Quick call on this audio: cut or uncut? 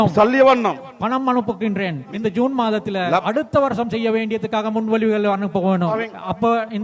cut